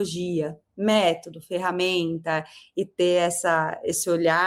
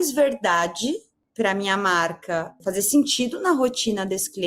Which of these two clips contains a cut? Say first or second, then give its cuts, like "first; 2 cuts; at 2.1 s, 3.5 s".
second; 2 cuts; at 1.2 s, 2.6 s